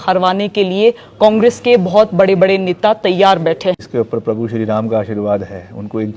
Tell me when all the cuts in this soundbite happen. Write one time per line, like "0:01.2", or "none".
0:03.8

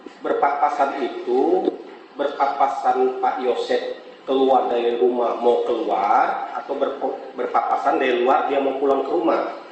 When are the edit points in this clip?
none

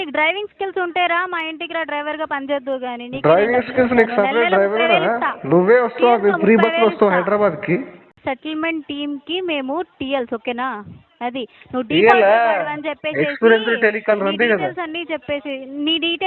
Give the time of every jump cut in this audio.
0:08.0

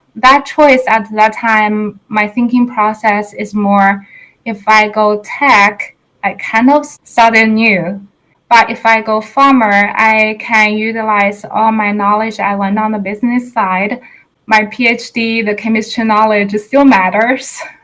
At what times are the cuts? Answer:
0:06.9
0:08.3
0:14.2

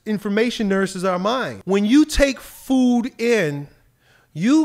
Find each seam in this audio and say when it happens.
0:01.5

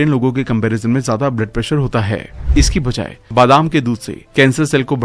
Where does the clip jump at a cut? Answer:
0:02.4

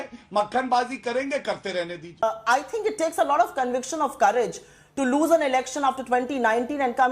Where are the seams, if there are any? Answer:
0:02.2

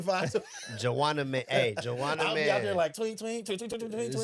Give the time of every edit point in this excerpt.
none

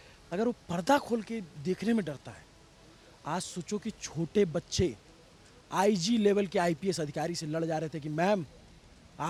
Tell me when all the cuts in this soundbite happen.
none

